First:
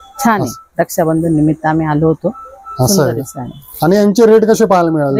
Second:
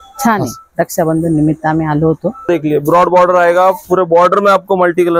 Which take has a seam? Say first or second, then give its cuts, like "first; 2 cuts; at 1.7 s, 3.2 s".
second; 1 cut; at 2.5 s